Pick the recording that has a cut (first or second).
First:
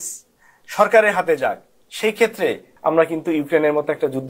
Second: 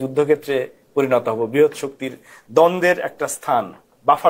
first